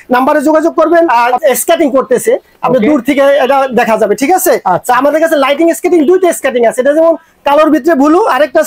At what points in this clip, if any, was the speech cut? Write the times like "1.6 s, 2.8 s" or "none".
1.2 s